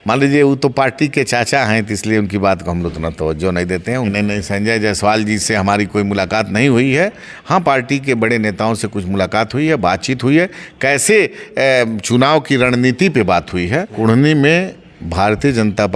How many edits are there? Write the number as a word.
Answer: two